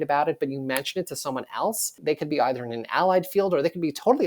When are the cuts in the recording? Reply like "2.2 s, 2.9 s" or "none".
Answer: 2.0 s